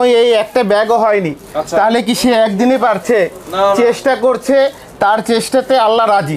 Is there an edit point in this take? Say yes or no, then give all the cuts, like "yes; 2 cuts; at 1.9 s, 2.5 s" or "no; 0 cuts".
no; 0 cuts